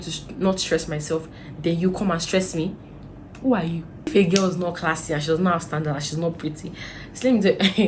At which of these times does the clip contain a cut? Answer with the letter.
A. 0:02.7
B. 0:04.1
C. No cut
B